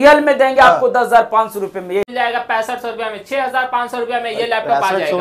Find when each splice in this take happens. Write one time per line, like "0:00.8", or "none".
0:02.1